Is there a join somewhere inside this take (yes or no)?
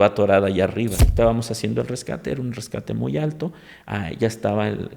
yes